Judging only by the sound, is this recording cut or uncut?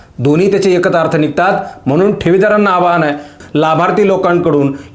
cut